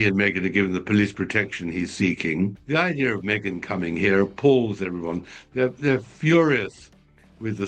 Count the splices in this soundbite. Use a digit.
1